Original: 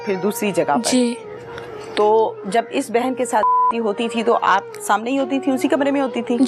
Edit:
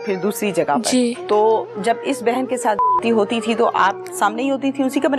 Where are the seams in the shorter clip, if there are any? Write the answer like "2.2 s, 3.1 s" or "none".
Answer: 1.2 s